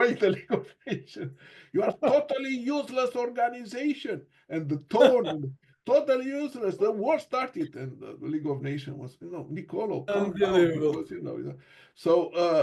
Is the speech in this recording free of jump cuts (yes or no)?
yes